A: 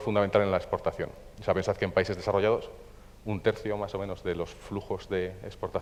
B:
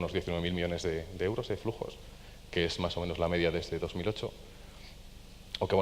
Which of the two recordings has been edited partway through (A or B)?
B